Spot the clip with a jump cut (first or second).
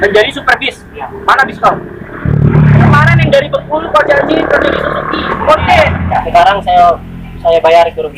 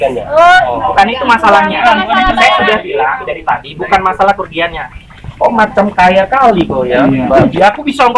first